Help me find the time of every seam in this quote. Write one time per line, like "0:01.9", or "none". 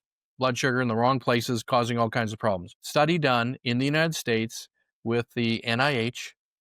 0:02.8